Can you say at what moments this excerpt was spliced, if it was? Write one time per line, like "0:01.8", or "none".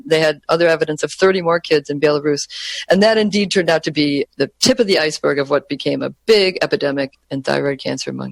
none